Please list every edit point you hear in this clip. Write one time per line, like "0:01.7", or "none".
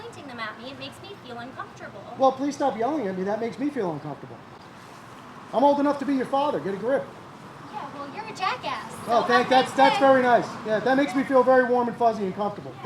none